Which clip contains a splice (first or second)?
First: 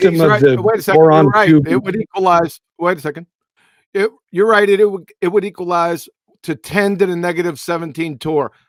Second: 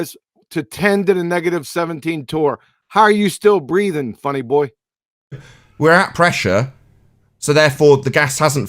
second